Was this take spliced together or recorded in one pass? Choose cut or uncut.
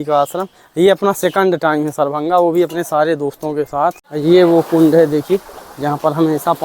cut